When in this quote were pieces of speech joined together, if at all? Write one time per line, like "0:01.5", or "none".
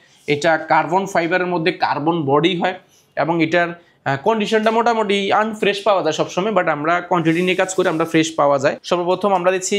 0:08.8

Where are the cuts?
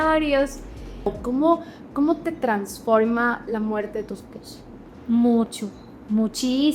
0:01.2

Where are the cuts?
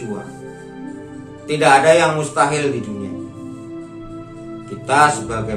0:03.1
0:04.5

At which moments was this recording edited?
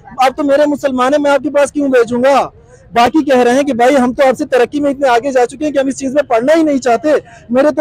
none

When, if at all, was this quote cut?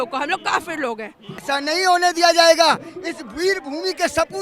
0:01.4

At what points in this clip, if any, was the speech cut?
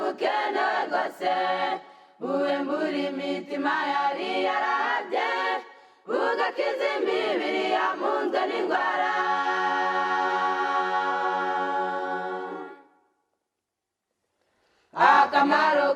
0:01.5

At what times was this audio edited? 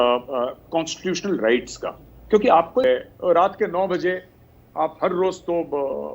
0:02.8

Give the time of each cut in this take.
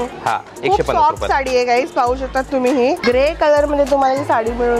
0:03.0

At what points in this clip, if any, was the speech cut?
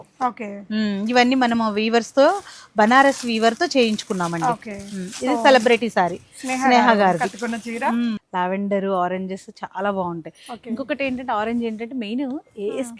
0:08.2

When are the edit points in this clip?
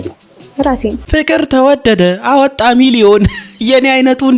0:01.0

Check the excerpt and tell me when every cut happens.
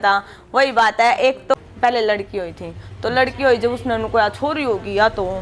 0:01.5

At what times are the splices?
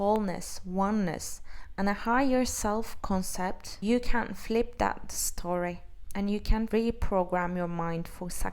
0:06.7

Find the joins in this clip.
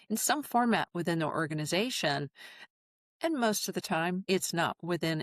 0:04.2

